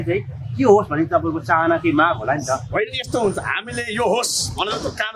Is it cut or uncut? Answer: uncut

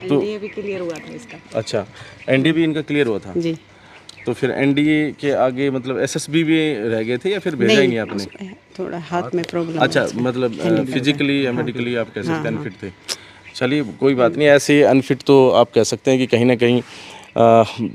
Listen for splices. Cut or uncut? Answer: uncut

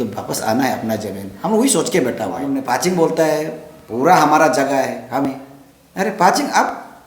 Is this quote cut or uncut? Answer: cut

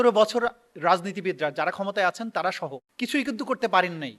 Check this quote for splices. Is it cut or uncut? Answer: cut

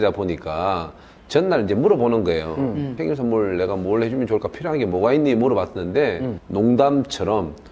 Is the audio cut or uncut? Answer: cut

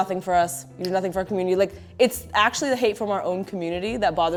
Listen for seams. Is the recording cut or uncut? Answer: uncut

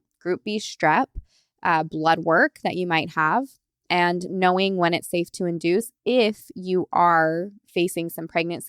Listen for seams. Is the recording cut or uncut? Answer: uncut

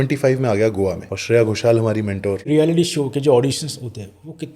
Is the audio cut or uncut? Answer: cut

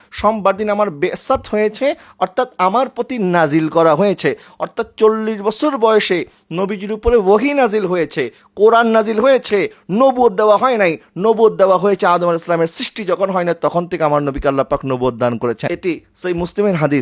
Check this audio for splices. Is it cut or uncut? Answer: cut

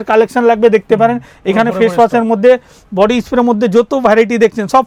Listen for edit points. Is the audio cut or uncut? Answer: uncut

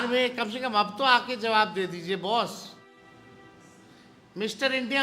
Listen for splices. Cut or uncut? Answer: cut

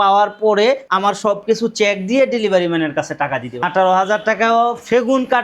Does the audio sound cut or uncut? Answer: cut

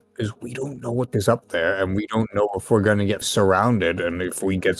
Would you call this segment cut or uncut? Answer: cut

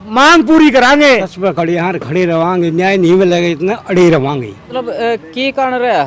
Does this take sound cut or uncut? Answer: cut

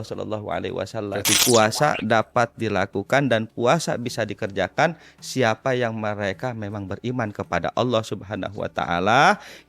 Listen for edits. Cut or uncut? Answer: cut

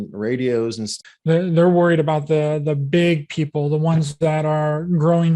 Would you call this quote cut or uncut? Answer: cut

